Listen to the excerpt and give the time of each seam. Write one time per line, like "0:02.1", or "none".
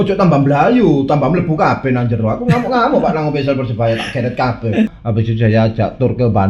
0:05.0

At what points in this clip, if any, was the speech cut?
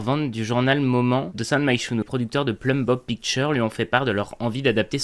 0:02.0

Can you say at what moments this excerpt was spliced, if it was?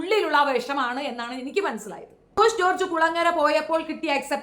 0:02.4

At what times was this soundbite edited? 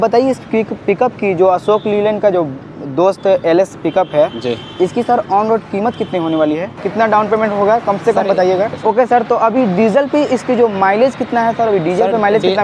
0:06.8
0:08.8

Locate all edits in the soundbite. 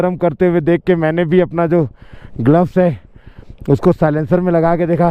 none

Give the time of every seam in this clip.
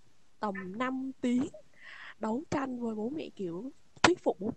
none

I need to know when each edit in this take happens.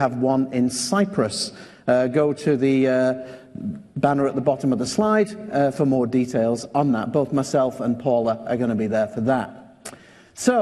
none

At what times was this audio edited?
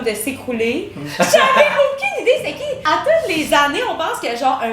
0:01.0
0:02.8

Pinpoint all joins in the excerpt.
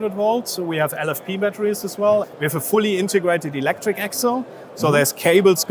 none

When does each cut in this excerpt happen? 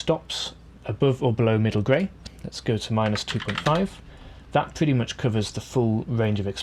0:02.2

